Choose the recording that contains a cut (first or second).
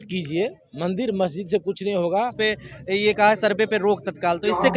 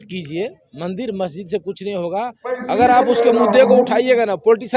first